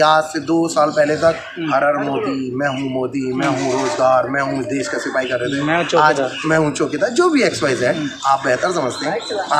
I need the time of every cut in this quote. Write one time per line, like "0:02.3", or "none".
none

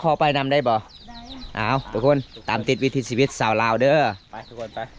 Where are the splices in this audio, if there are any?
none

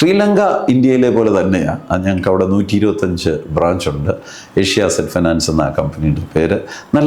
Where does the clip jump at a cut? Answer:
none

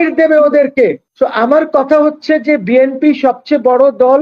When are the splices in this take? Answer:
0:01.0

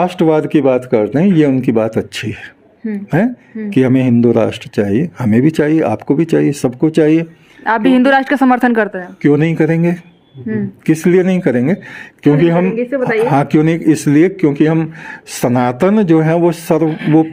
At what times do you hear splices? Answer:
none

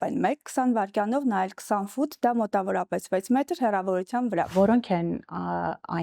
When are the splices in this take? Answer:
0:04.5

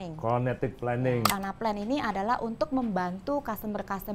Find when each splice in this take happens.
0:01.3

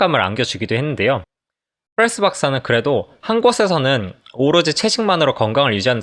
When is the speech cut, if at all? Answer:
none

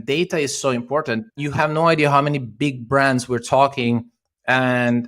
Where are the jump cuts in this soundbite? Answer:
0:01.4

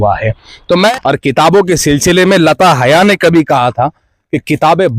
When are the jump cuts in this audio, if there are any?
0:00.9

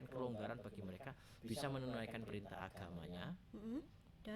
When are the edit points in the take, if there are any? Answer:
none

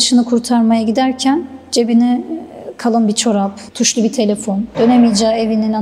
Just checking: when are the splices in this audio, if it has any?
none

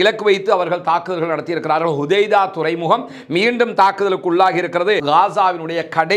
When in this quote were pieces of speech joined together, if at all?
0:05.0

